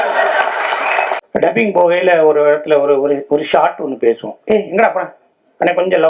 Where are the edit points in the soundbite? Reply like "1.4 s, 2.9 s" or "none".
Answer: 1.2 s